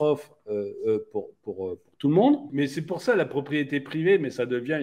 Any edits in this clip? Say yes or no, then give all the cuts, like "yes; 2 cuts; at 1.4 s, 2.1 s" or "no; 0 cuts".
yes; 1 cut; at 2.5 s